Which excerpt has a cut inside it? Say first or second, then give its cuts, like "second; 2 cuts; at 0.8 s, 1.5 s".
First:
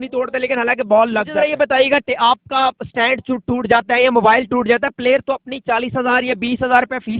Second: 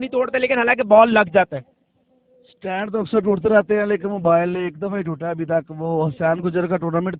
first; 1 cut; at 1.3 s